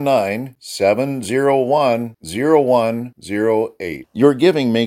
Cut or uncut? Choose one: uncut